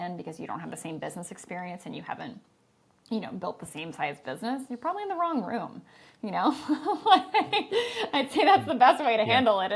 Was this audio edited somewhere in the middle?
no; 0 cuts

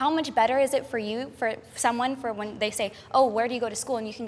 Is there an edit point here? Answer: no; 0 cuts

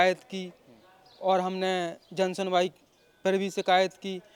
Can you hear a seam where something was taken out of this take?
no; 0 cuts

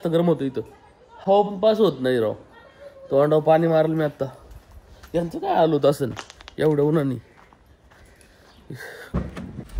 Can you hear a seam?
no; 0 cuts

